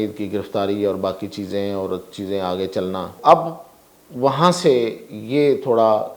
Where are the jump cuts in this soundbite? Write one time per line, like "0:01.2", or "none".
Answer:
0:03.1